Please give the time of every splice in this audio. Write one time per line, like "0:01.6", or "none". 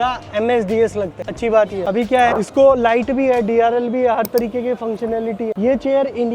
none